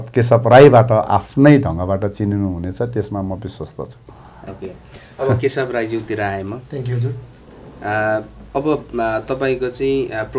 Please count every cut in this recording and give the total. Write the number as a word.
zero